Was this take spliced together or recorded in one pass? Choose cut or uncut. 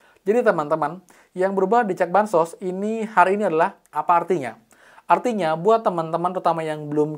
cut